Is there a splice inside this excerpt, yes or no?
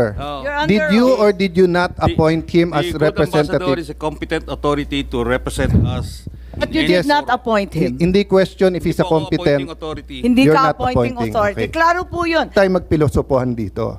yes